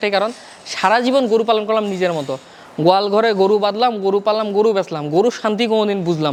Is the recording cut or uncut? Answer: uncut